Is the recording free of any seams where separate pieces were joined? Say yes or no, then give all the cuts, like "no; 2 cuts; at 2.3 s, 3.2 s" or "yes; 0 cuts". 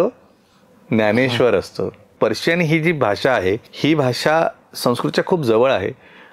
no; 2 cuts; at 2.1 s, 3.7 s